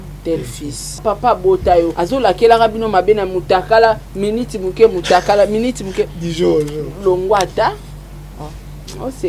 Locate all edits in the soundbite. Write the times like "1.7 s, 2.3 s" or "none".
1.0 s, 2.0 s